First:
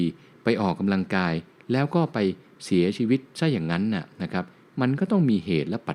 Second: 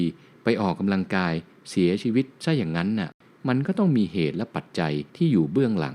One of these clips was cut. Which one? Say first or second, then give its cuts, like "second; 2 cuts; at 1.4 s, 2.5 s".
second; 3 cuts; at 1.5 s, 3.2 s, 5.0 s